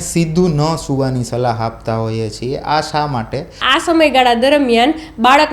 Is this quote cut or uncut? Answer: cut